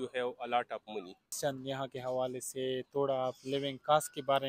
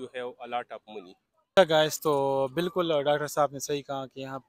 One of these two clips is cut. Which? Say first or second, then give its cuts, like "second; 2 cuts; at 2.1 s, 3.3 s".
first; 1 cut; at 1.3 s